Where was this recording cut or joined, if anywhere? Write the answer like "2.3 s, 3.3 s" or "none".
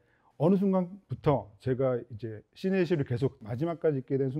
3.4 s